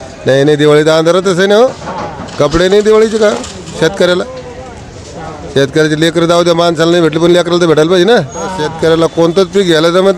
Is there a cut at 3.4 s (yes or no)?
no